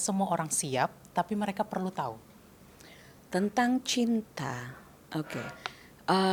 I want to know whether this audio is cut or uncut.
uncut